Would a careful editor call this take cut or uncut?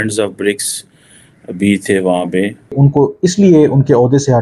cut